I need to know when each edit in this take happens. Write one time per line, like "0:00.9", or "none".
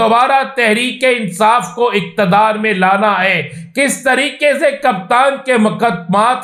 none